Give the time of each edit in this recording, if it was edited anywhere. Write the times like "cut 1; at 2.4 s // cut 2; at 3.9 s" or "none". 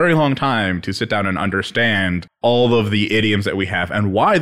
cut 1; at 2.3 s